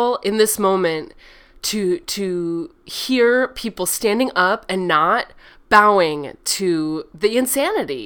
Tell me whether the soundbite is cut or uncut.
uncut